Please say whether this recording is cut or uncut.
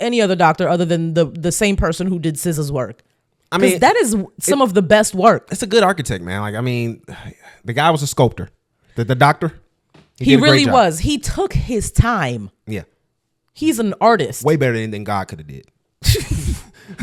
uncut